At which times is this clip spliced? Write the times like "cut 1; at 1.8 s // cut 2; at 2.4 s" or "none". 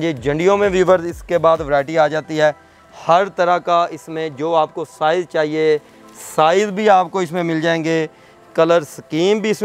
none